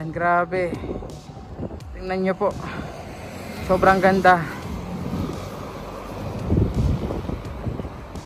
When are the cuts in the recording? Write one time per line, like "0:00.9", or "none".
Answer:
none